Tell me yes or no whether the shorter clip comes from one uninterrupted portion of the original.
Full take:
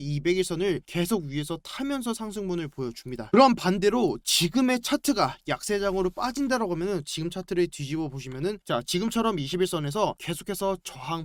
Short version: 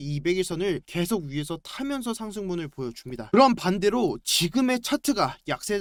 yes